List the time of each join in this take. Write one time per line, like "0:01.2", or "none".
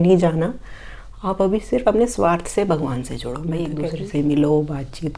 0:03.8